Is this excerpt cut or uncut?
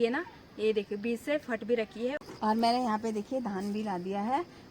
cut